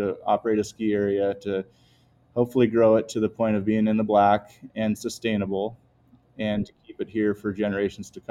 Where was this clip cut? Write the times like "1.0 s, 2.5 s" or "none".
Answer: none